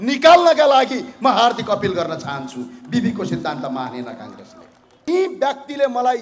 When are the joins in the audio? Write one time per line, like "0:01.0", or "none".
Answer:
0:05.1